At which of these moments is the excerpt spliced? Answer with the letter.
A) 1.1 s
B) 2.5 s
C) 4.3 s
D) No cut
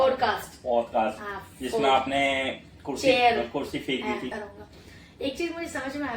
C